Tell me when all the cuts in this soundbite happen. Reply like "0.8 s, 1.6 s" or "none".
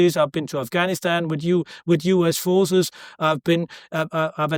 none

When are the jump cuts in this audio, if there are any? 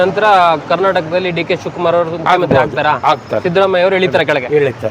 none

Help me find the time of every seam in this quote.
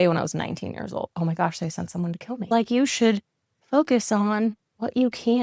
1.1 s, 2.5 s

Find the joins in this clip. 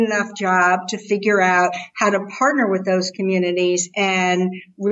none

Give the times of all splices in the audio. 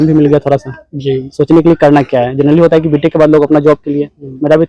none

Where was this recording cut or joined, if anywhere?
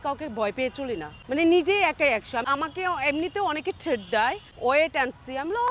1.1 s, 2.5 s, 4.5 s

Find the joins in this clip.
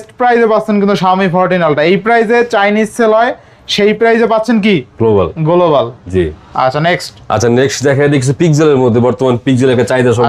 none

